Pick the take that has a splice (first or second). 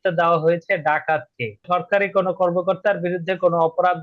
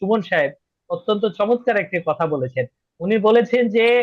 first